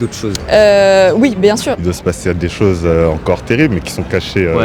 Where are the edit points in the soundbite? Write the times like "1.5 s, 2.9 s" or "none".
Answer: 1.7 s